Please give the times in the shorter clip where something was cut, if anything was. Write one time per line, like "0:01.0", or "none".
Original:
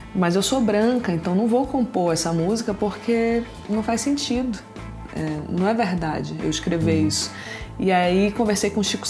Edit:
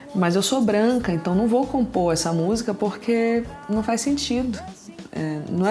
none